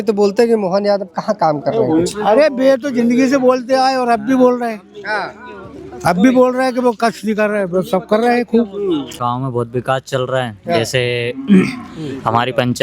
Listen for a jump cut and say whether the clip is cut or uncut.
cut